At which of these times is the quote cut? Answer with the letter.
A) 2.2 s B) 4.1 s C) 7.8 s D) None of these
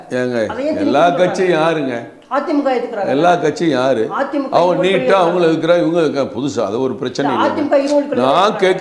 D